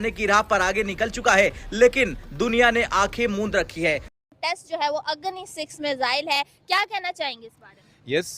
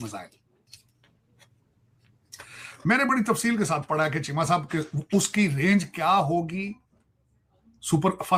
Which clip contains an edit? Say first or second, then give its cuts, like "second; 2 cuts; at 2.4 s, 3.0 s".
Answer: first; 1 cut; at 4.1 s